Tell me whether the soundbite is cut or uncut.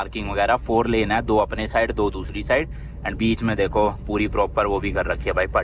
uncut